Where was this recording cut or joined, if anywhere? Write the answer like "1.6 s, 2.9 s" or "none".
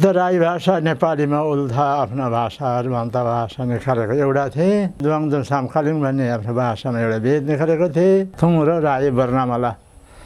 5.0 s, 8.3 s